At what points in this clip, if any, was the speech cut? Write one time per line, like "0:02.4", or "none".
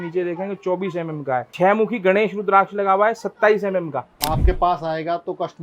0:01.5
0:04.2